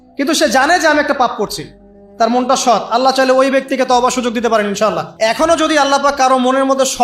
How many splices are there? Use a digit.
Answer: 1